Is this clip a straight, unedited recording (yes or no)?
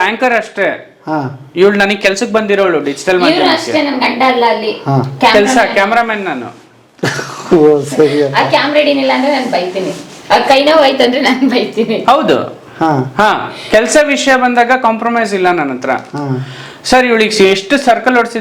yes